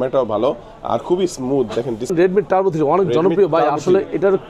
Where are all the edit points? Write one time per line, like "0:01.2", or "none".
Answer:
0:02.1